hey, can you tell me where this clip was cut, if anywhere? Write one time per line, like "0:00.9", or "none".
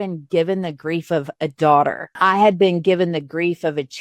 0:02.0